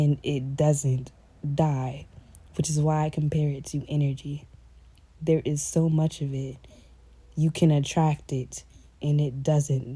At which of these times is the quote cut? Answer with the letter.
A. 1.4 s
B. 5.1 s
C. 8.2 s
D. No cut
D